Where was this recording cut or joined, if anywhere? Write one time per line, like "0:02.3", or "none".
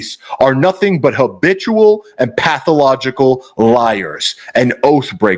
none